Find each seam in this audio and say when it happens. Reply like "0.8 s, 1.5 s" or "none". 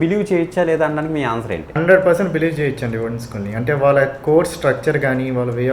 1.7 s